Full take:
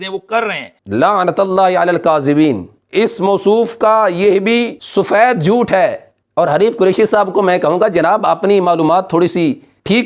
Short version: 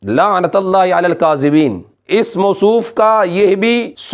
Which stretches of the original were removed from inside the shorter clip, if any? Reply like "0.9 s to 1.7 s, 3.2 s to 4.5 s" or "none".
none